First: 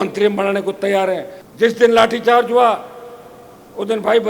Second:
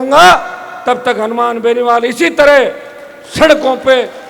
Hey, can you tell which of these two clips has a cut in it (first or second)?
first